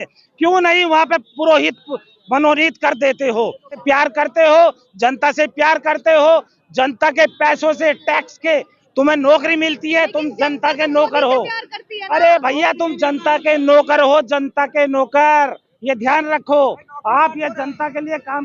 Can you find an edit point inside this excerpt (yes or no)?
yes